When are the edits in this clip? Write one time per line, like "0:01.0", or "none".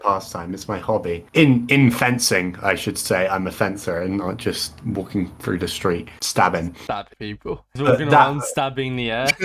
none